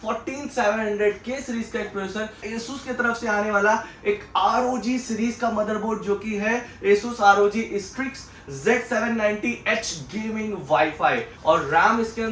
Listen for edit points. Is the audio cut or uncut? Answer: cut